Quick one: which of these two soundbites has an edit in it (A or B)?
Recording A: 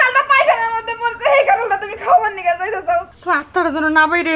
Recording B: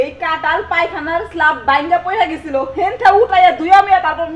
A